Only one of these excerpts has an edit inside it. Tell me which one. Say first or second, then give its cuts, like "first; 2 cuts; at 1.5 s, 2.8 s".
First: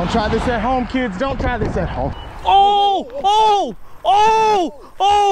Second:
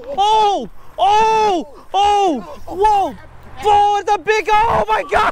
first; 1 cut; at 2.1 s